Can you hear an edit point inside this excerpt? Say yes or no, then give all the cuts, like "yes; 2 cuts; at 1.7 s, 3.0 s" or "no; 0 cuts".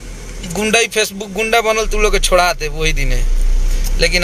no; 0 cuts